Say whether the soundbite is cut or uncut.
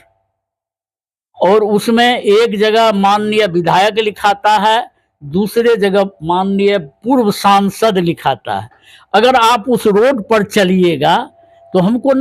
uncut